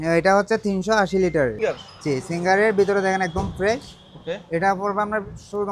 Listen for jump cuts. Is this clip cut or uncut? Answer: cut